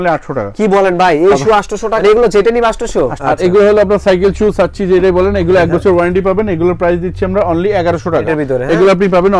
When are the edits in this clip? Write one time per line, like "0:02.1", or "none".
0:02.0
0:03.2
0:08.2